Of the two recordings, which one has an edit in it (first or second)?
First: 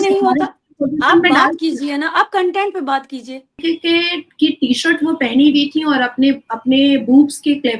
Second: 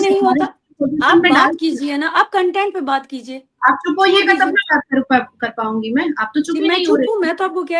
first